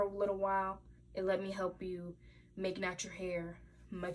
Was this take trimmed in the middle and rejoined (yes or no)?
no